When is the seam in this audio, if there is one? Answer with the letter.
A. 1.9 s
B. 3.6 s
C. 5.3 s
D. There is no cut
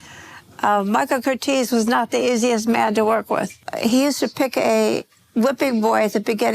B